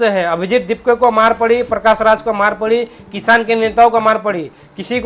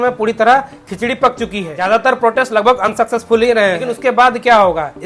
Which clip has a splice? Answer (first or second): second